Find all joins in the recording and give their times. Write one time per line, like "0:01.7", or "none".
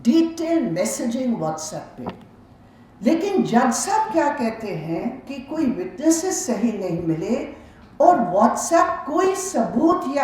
0:05.3